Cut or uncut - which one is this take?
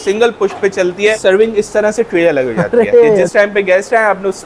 cut